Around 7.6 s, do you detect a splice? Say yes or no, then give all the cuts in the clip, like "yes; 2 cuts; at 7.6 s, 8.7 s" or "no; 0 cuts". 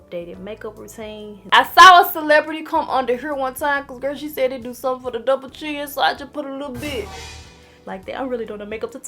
yes; 2 cuts; at 1.3 s, 7.6 s